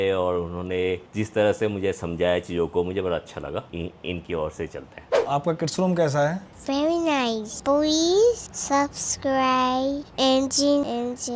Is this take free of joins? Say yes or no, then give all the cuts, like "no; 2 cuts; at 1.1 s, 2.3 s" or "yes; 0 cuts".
no; 4 cuts; at 3.7 s, 5.1 s, 7.5 s, 8.5 s